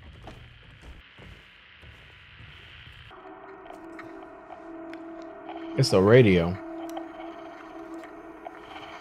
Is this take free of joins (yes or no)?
no